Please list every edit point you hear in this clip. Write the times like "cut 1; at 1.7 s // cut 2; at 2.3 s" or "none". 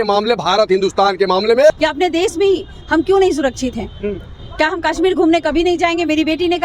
cut 1; at 1.7 s

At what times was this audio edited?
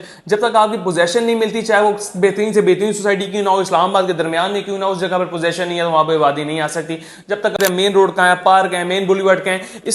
cut 1; at 7.6 s

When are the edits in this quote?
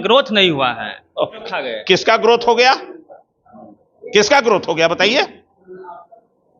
cut 1; at 1.4 s

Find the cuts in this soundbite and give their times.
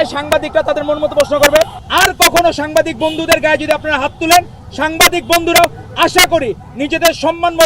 cut 1; at 1.8 s

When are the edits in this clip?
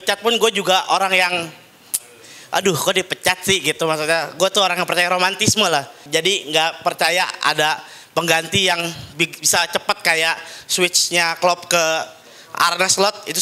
cut 1; at 6.0 s

